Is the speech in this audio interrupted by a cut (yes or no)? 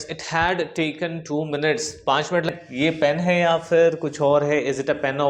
yes